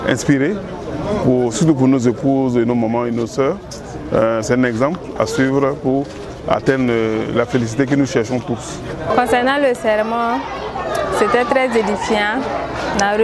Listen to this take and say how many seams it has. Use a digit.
1